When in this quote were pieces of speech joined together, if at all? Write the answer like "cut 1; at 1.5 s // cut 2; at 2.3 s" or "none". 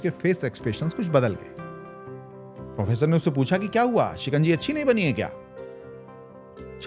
none